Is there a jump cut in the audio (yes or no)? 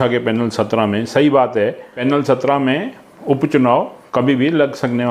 yes